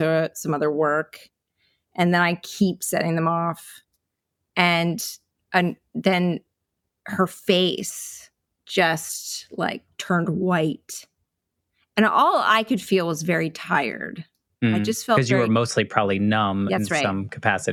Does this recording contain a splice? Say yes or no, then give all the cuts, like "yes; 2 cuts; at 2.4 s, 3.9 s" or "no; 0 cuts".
no; 0 cuts